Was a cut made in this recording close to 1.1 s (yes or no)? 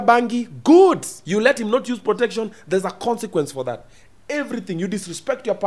yes